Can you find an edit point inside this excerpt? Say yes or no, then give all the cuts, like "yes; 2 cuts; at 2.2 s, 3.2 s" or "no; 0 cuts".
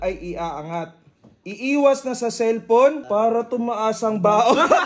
yes; 1 cut; at 3.0 s